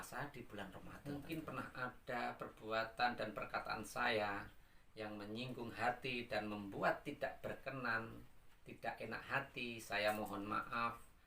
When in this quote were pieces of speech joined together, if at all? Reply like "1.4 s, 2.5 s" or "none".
0.9 s